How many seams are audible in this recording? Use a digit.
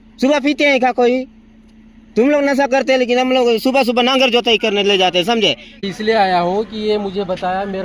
1